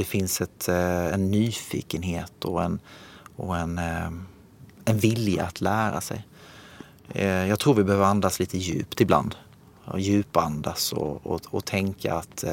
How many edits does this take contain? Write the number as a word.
zero